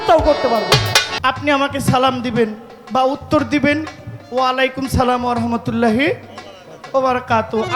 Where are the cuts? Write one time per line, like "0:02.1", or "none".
0:01.1